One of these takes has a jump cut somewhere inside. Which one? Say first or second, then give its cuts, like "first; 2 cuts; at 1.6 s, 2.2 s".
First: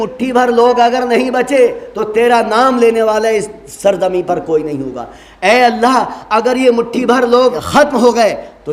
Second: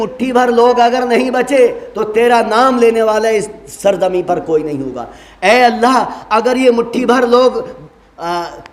first; 1 cut; at 7.6 s